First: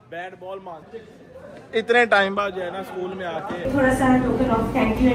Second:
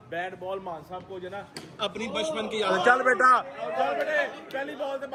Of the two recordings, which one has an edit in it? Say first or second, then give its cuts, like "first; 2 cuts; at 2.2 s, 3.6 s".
first; 2 cuts; at 1.0 s, 3.7 s